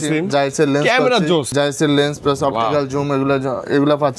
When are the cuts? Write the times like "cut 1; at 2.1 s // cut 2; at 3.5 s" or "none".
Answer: cut 1; at 1.5 s